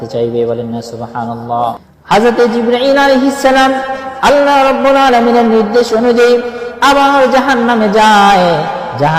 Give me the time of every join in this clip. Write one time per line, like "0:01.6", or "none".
0:01.9